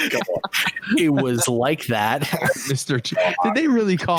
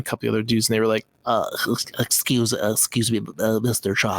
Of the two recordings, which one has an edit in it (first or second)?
second